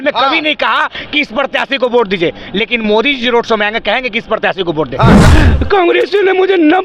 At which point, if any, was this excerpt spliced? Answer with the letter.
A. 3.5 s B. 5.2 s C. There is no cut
B